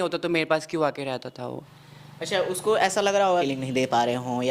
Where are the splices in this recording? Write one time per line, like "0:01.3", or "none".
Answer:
0:01.6
0:03.5